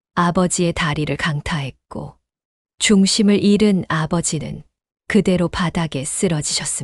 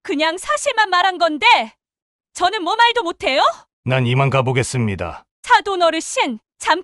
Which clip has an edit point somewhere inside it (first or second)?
second